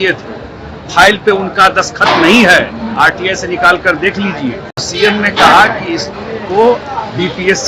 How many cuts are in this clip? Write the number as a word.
one